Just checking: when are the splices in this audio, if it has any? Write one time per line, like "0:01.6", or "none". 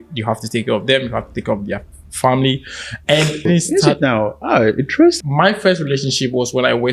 0:03.5
0:05.2